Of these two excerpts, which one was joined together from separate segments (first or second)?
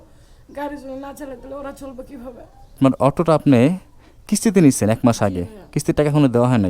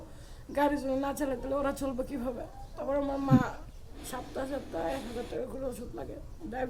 first